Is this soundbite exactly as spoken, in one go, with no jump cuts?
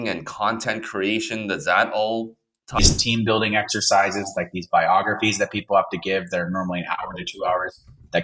no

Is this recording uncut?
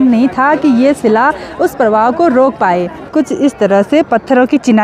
no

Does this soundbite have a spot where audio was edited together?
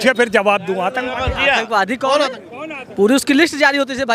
no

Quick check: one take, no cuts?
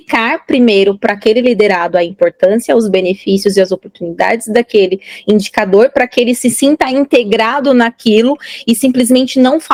yes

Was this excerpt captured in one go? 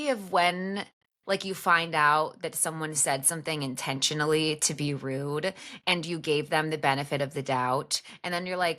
yes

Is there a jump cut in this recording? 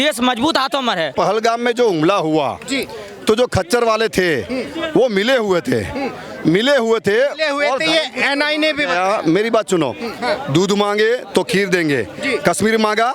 yes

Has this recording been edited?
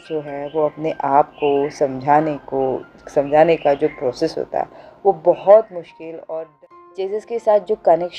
yes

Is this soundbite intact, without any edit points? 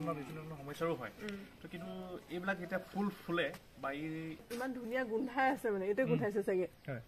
no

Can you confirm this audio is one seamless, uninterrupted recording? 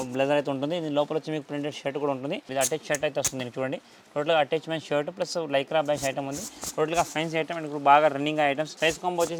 yes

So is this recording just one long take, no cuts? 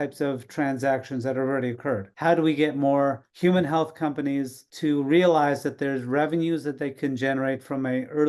no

